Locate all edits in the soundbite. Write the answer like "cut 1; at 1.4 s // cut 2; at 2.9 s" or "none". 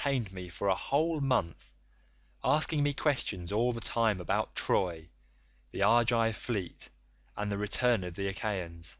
none